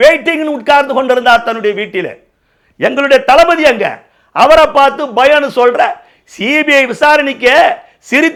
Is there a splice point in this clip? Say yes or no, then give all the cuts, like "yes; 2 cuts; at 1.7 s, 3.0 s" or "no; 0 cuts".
no; 0 cuts